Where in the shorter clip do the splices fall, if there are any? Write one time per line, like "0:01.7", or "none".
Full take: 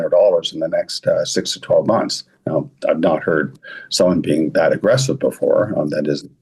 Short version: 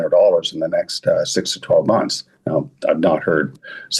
none